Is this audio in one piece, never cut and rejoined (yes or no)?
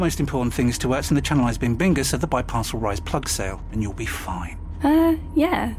yes